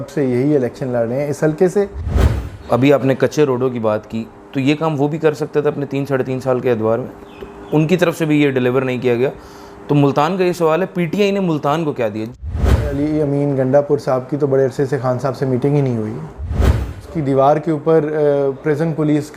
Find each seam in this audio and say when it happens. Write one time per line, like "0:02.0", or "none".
0:02.2
0:12.4
0:16.5